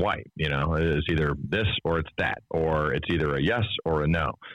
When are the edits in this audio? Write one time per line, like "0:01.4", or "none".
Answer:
none